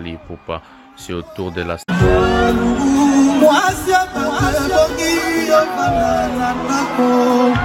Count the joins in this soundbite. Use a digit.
1